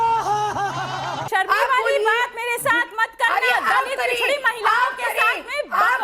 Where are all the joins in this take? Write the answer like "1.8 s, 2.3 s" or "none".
1.2 s